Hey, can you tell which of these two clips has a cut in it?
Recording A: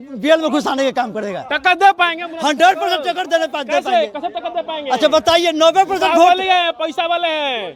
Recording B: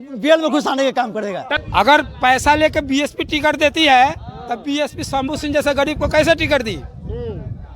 B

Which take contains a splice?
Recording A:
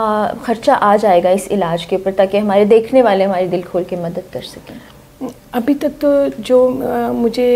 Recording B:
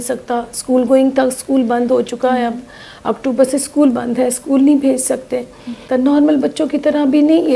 B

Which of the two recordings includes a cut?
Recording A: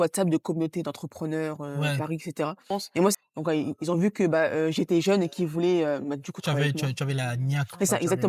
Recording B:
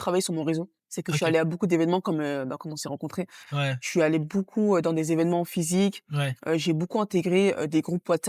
A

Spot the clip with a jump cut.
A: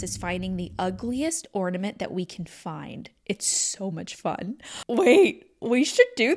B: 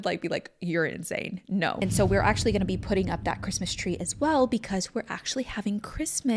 B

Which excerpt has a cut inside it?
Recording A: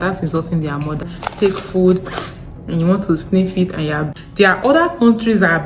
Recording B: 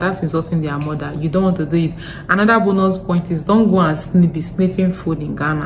A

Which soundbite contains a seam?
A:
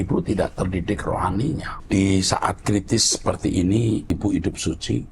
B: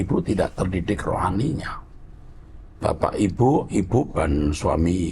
A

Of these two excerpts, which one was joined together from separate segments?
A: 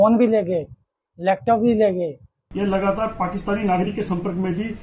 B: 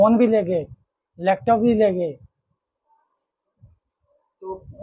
A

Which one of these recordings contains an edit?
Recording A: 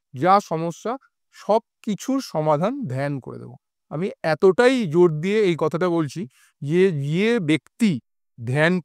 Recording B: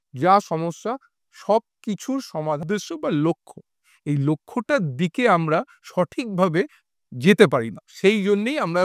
B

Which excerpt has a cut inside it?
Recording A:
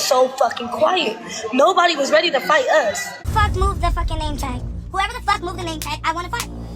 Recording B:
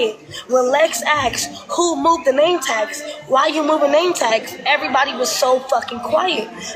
A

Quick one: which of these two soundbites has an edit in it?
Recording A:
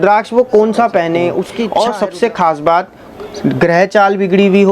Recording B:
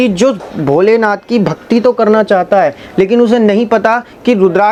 A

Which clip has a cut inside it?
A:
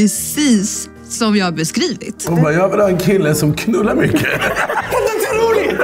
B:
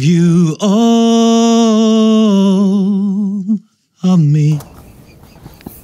A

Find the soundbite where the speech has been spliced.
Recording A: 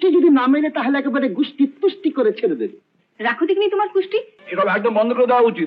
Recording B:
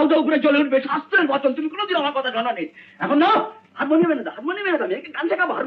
A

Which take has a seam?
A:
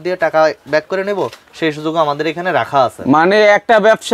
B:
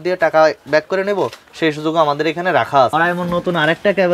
B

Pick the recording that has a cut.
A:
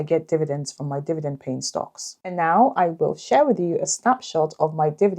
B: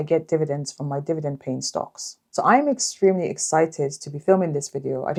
A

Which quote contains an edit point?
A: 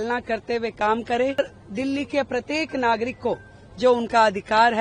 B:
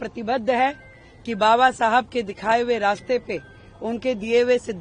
A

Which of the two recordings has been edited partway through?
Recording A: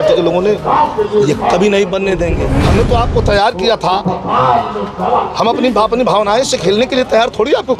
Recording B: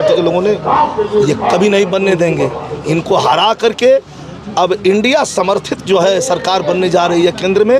A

